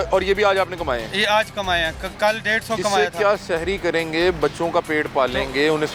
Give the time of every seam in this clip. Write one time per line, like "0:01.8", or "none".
none